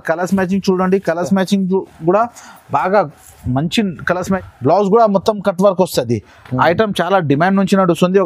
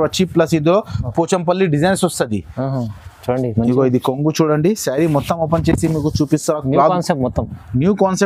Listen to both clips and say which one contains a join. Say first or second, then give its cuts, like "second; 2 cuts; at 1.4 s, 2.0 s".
first; 1 cut; at 4.4 s